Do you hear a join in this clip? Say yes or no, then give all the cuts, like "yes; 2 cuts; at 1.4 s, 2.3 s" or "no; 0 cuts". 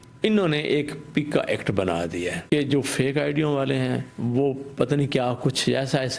yes; 1 cut; at 2.4 s